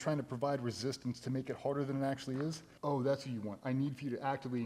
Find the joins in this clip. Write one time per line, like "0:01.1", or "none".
0:02.7